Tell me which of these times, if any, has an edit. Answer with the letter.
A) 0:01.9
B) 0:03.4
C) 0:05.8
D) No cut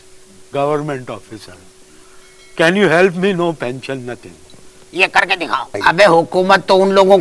C